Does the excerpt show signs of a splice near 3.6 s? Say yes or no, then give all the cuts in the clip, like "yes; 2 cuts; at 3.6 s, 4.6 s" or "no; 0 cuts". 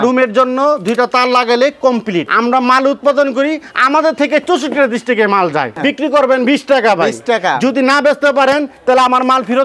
no; 2 cuts; at 2.3 s, 5.8 s